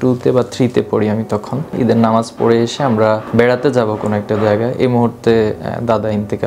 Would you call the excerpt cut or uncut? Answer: cut